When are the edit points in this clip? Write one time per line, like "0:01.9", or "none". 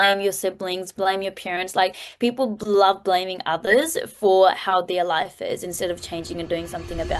none